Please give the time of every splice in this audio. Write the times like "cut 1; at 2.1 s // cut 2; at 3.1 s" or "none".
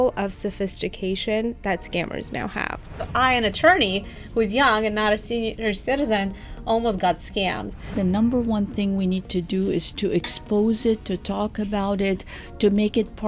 cut 1; at 3.1 s // cut 2; at 5.5 s // cut 3; at 7.9 s